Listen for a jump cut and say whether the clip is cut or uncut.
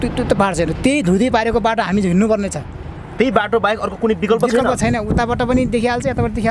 uncut